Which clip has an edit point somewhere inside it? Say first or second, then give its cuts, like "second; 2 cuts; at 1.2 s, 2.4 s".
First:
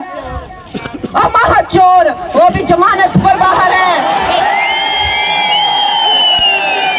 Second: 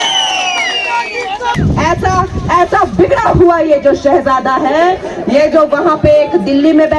second; 1 cut; at 1.5 s